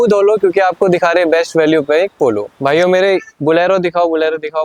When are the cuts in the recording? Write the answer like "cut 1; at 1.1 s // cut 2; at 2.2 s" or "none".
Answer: cut 1; at 2.5 s